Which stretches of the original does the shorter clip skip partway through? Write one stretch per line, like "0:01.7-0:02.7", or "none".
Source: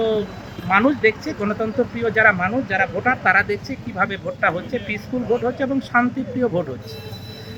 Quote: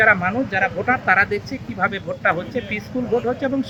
none